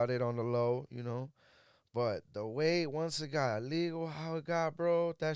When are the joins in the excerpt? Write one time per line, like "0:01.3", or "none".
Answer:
none